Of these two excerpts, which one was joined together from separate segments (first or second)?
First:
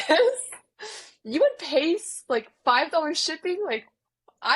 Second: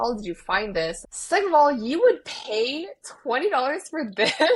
second